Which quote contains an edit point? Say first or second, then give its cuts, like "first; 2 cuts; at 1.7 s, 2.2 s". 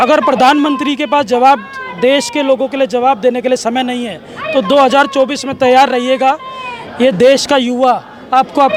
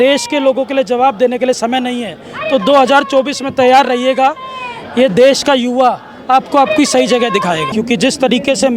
second; 1 cut; at 7.7 s